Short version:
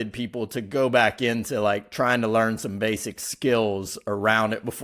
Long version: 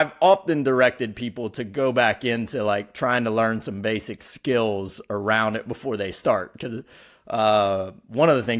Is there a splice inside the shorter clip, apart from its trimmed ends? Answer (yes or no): no